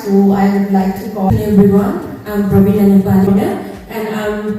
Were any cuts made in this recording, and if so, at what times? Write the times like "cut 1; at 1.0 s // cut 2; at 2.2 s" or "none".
cut 1; at 1.3 s // cut 2; at 3.3 s